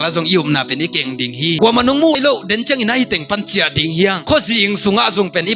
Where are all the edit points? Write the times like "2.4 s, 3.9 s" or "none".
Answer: 1.6 s